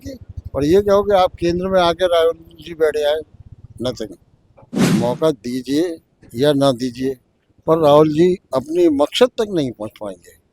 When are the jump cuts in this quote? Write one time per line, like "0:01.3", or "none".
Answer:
0:04.8